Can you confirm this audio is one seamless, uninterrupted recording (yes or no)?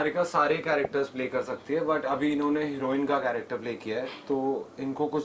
yes